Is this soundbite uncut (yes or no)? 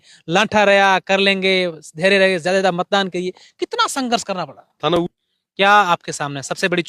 no